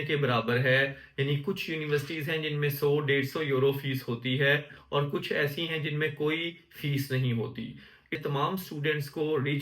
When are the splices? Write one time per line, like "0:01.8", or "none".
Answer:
0:08.2